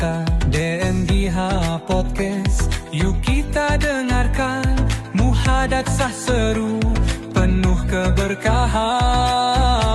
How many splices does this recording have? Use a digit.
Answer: 0